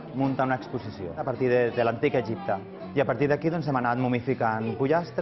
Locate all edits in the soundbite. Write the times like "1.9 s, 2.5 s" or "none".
1.2 s, 2.8 s